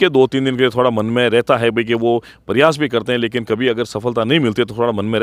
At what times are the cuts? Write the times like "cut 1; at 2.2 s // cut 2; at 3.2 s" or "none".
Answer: none